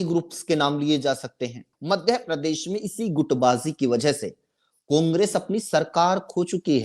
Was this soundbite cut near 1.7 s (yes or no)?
yes